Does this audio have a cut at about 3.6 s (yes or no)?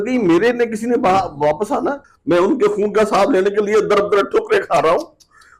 no